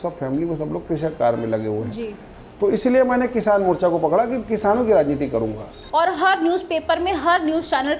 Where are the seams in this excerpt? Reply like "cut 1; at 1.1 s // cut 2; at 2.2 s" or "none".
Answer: cut 1; at 5.8 s